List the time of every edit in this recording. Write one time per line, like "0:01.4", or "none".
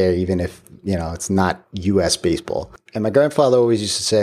0:02.8

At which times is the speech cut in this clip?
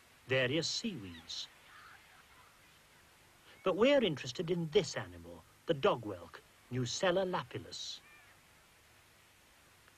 none

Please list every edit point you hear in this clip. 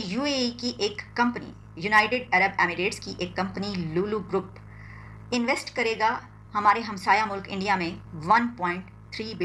none

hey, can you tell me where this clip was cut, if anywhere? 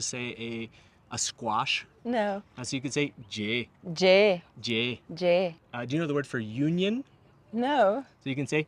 0:01.9
0:05.6

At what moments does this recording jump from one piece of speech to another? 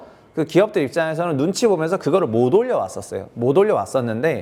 none

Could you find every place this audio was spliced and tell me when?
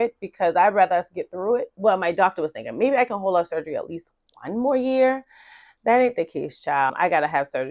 0:01.7

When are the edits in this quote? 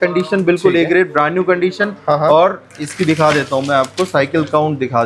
none

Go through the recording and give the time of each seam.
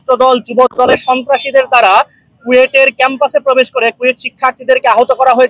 none

